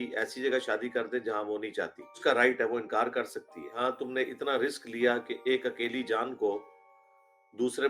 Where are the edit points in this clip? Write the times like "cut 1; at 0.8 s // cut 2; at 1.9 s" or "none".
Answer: cut 1; at 2.2 s // cut 2; at 3.7 s